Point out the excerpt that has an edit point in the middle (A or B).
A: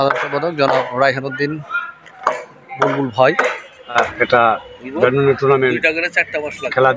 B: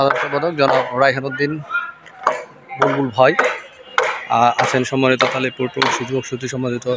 A